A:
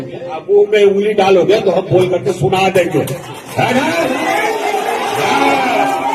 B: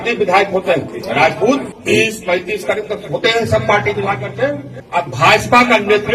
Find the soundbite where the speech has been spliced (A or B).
B